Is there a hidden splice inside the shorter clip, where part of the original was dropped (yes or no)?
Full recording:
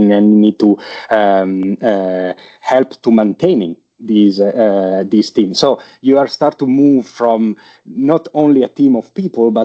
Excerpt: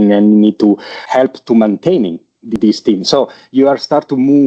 yes